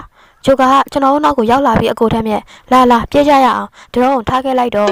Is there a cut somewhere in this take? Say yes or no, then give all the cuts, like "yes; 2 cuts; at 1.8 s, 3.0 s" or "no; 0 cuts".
no; 0 cuts